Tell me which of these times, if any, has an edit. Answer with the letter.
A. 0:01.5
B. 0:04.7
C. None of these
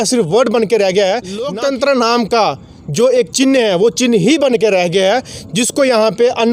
A